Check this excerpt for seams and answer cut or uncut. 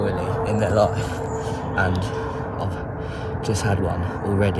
uncut